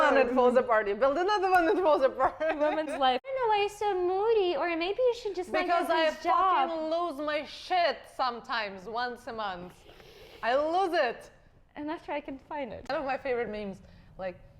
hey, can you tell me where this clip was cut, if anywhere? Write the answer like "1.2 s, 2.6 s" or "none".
3.3 s, 12.8 s